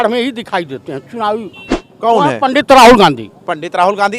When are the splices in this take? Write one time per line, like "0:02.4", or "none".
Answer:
0:01.8